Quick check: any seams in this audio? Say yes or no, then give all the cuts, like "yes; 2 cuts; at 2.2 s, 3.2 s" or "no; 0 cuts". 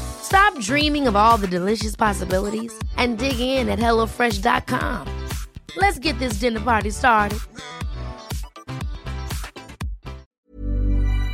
yes; 1 cut; at 10.2 s